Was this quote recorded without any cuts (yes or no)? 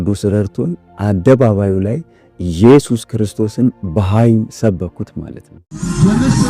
yes